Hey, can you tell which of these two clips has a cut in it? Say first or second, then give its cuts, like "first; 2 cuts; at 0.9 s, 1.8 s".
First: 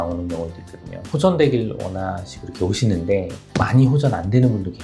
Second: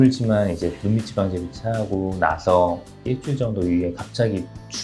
first; 2 cuts; at 1.0 s, 3.4 s